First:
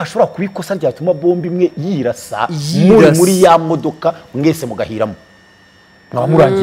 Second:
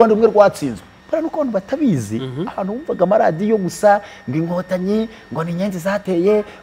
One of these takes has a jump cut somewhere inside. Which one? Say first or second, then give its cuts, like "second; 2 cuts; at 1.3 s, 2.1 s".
second; 1 cut; at 0.9 s